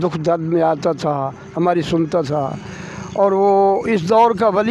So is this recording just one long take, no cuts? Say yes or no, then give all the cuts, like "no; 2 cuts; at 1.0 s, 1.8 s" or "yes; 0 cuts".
yes; 0 cuts